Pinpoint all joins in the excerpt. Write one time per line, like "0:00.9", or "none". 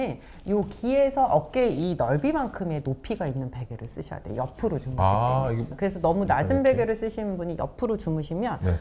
0:05.7